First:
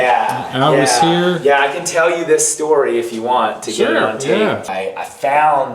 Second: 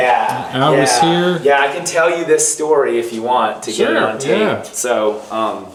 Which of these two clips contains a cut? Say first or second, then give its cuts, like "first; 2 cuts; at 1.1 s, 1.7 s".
first; 1 cut; at 4.7 s